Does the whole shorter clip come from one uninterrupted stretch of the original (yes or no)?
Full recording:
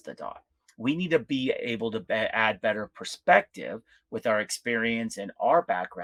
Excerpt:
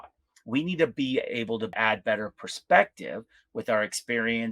no